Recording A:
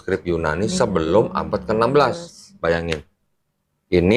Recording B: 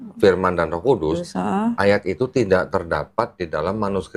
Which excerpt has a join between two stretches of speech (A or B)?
A